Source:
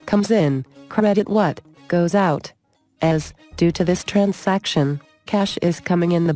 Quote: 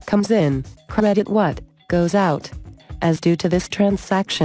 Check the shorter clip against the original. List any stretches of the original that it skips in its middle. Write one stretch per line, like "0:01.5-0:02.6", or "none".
0:02.9-0:03.3